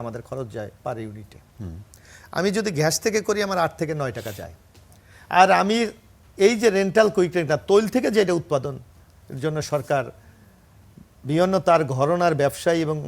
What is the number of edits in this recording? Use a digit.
0